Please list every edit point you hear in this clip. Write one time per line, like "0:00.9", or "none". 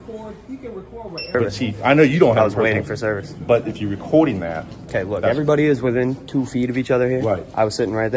0:01.3